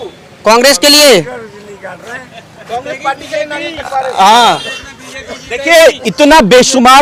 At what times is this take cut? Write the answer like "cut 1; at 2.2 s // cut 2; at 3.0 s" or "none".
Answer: none